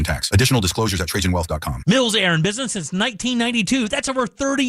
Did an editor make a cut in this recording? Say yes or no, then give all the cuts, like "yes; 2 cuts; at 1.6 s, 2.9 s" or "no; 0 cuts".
yes; 1 cut; at 1.8 s